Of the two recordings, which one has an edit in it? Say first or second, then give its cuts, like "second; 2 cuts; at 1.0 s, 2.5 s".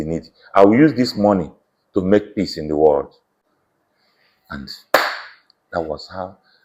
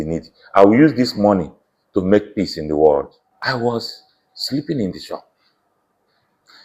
second; 1 cut; at 3.2 s